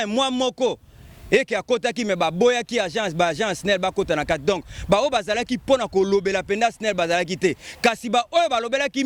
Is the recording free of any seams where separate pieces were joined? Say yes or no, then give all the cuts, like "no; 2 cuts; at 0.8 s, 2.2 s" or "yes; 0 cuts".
yes; 0 cuts